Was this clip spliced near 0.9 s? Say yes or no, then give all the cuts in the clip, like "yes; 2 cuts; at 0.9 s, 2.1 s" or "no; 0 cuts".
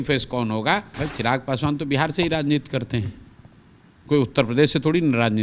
yes; 1 cut; at 0.9 s